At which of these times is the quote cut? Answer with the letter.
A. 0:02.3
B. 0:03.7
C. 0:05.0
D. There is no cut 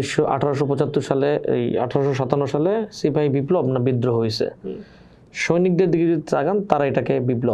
D